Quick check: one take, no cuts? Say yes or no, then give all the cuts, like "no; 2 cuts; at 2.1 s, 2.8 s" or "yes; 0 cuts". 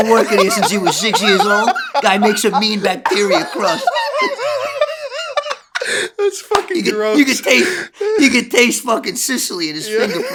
yes; 0 cuts